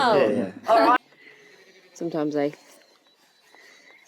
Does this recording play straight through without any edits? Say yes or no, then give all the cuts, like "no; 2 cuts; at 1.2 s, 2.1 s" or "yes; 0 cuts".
no; 1 cut; at 1.0 s